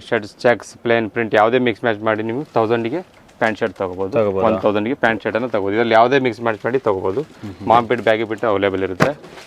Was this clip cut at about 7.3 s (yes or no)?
no